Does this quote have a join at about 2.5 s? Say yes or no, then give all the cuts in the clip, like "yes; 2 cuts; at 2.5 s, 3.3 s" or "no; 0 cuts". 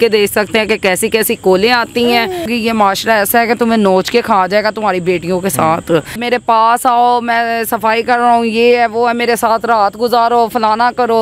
yes; 2 cuts; at 2.5 s, 6.2 s